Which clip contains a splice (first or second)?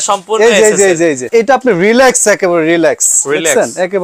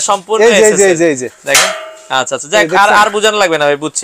first